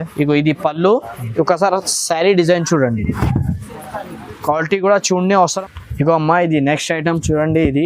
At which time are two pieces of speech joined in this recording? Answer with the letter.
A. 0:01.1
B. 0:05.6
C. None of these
B